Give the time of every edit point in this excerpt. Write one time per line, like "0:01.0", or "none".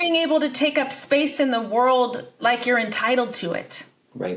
0:02.3